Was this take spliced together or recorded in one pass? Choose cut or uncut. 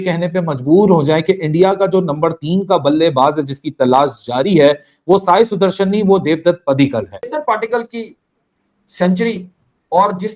cut